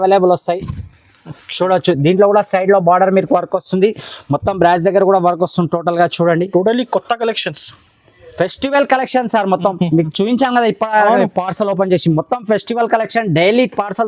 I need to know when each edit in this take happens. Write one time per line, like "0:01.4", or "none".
none